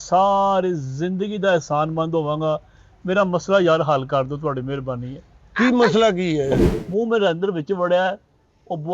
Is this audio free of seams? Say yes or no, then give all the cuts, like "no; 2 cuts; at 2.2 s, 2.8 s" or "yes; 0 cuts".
no; 1 cut; at 6.6 s